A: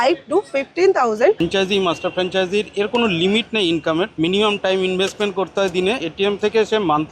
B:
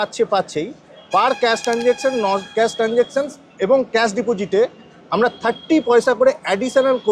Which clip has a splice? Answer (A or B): A